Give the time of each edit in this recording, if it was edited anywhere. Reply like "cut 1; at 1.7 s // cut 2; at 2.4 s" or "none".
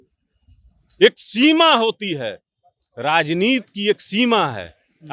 none